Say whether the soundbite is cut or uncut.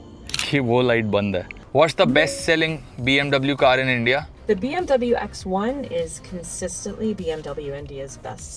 cut